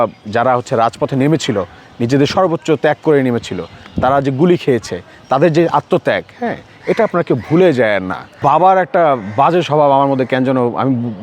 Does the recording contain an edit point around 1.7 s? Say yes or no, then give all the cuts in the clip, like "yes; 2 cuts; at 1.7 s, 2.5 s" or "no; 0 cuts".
no; 1 cut; at 8.2 s